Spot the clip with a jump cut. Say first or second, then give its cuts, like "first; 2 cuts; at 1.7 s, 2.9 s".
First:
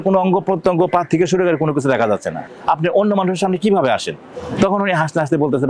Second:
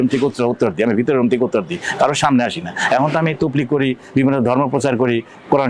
first; 1 cut; at 2.5 s